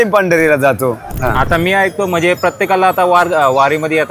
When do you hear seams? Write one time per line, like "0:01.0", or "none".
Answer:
0:01.1